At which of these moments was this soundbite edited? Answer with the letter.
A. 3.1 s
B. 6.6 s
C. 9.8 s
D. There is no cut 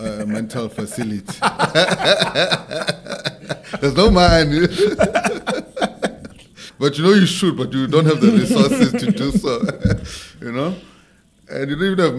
B